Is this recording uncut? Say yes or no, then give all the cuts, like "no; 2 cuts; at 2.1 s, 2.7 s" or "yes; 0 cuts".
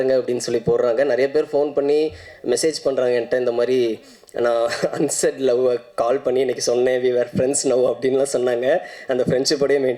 yes; 0 cuts